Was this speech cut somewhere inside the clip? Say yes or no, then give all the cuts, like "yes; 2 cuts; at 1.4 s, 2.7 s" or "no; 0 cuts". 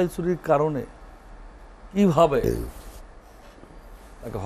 no; 0 cuts